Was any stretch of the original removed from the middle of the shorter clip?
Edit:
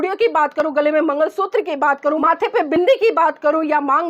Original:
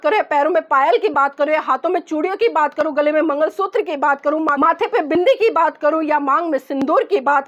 yes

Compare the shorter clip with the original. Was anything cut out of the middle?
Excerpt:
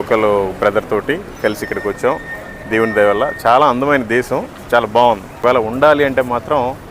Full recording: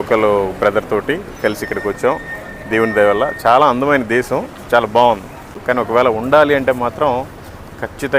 yes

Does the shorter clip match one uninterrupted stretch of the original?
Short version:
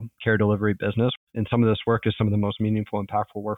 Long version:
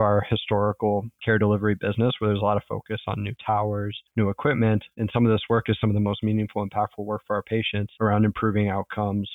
no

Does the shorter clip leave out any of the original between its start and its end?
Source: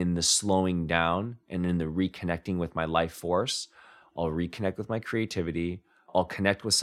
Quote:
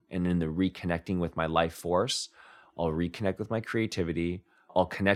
no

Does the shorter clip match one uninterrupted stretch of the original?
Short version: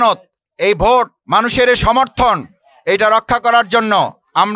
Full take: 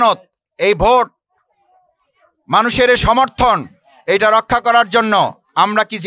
no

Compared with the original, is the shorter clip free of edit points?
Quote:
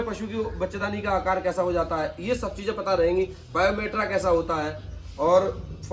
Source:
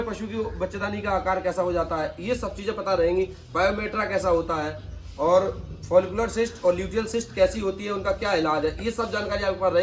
yes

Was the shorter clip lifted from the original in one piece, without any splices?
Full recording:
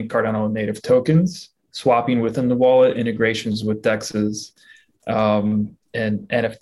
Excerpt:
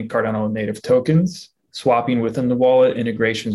yes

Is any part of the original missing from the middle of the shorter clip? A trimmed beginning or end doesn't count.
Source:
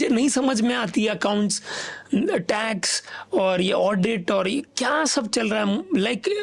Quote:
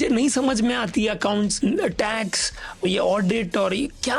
yes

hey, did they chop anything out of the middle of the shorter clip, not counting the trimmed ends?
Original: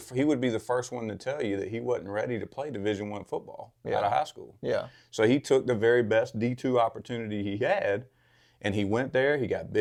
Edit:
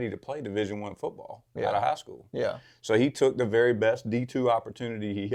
no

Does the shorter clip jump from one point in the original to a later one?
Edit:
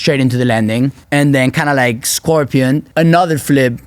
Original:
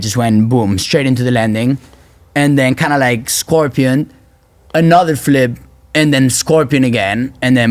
yes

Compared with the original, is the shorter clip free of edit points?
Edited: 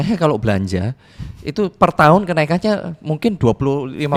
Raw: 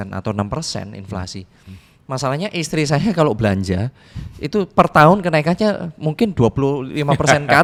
yes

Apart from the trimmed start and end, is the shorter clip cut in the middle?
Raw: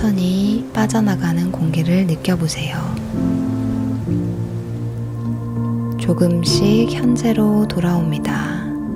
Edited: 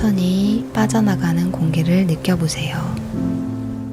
no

